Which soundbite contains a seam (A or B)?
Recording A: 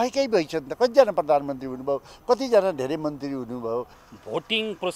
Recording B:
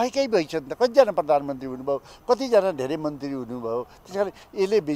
A